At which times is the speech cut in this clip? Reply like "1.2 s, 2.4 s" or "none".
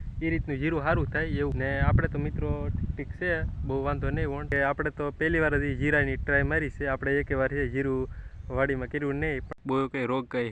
1.5 s, 4.5 s, 9.5 s